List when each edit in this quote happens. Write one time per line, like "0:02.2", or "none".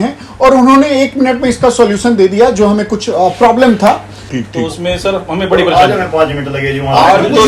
0:04.3